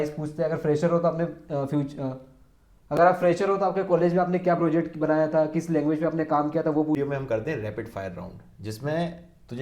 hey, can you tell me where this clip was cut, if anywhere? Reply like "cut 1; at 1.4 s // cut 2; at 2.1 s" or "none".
cut 1; at 7.0 s